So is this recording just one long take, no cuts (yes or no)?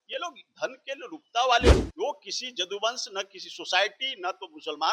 no